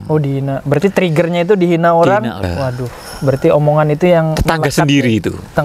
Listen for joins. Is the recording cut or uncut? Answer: cut